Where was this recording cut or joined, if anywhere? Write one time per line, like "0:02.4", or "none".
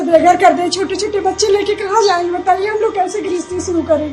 none